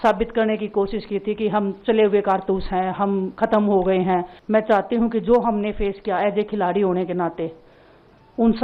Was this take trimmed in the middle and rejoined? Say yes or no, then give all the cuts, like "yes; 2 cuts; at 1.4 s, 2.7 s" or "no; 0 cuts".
yes; 1 cut; at 4.4 s